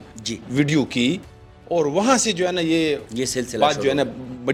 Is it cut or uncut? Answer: uncut